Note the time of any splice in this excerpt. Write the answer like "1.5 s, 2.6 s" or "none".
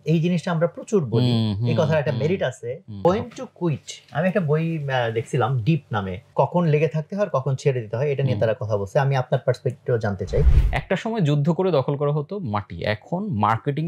3.0 s, 6.2 s, 10.6 s